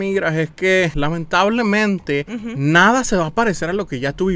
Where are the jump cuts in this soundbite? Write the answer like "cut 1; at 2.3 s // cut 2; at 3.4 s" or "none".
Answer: cut 1; at 0.9 s // cut 2; at 2.4 s